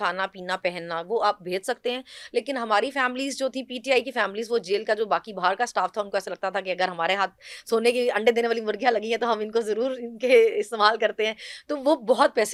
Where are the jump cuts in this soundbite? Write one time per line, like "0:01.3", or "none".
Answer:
none